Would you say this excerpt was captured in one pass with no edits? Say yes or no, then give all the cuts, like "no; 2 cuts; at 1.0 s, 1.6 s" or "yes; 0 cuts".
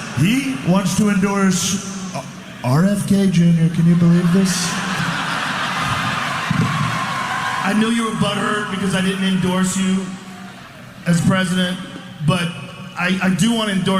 no; 1 cut; at 5.0 s